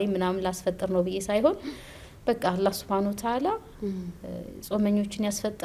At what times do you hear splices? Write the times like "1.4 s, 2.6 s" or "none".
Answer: none